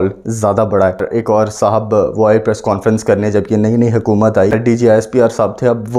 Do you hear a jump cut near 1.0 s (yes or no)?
yes